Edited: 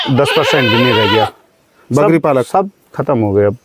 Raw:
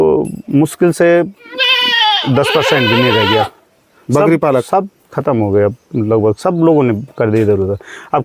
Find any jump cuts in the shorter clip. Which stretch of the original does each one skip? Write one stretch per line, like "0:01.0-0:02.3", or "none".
none